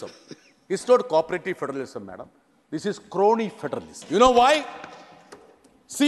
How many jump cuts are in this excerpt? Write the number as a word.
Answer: one